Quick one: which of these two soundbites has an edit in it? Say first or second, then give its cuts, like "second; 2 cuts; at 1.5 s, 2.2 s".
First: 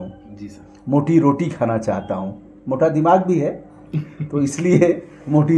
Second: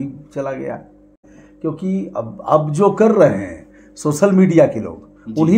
second; 1 cut; at 1.2 s